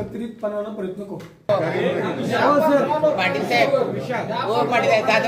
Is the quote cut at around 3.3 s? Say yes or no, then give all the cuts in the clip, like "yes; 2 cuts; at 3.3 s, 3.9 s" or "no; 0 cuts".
no; 1 cut; at 1.5 s